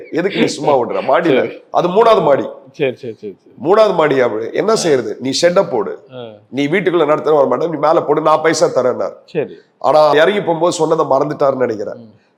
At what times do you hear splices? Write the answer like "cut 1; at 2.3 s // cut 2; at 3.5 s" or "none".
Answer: none